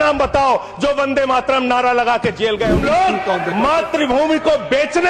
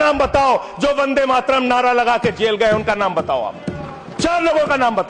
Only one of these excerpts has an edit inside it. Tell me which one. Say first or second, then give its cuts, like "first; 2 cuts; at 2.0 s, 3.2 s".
first; 1 cut; at 2.8 s